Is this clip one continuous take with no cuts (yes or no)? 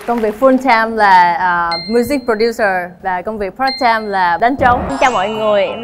no